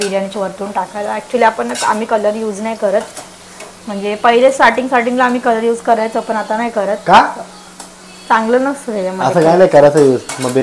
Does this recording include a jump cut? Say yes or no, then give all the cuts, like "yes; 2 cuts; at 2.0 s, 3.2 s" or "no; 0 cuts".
no; 0 cuts